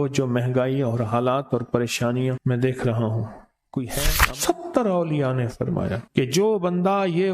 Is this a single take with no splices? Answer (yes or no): no